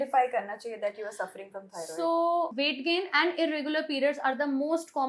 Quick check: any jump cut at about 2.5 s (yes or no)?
yes